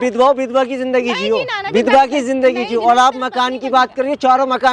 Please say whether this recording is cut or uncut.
uncut